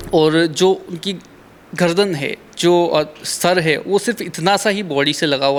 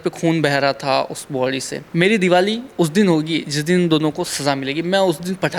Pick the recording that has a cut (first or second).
second